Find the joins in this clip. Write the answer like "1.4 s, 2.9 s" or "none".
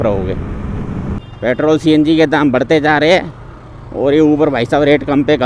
1.3 s